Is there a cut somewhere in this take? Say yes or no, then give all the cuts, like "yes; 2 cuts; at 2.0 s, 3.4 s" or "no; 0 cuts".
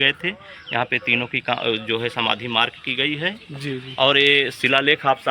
no; 0 cuts